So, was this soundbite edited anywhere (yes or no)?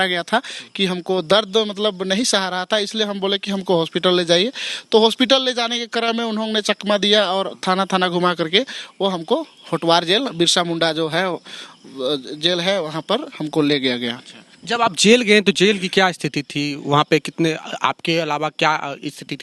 no